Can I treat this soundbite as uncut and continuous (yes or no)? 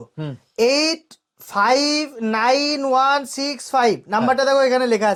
yes